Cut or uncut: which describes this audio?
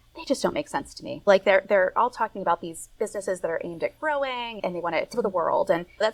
uncut